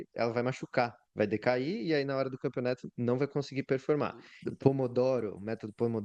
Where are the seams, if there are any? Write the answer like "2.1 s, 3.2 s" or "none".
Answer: 4.4 s